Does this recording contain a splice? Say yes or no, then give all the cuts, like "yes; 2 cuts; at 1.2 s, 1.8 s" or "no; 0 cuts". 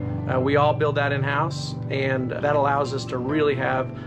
yes; 1 cut; at 2.4 s